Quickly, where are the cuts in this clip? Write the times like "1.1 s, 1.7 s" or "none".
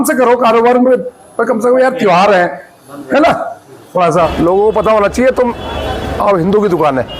4.3 s